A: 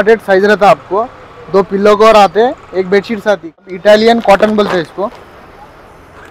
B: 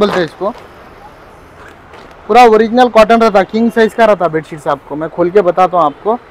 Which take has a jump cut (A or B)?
A